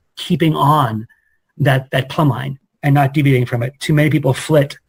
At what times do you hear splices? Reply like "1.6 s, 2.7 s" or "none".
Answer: none